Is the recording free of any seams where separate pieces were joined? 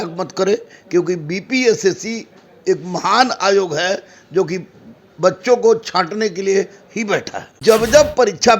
no; 1 cut; at 7.5 s

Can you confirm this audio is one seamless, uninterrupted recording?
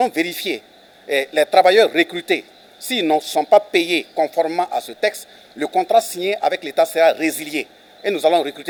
yes; 0 cuts

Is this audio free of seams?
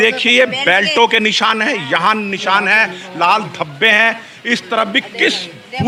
yes; 0 cuts

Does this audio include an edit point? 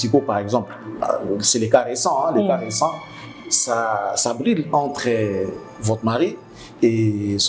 no; 0 cuts

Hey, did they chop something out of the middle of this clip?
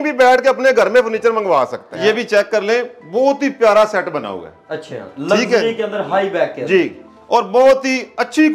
yes; 1 cut; at 1.9 s

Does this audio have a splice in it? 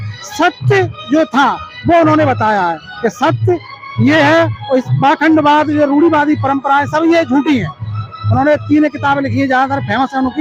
no; 0 cuts

